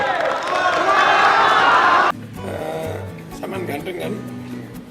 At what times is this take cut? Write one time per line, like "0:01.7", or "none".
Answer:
0:02.1